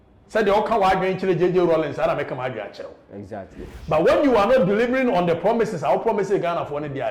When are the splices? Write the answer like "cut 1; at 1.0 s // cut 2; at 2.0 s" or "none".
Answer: cut 1; at 3.6 s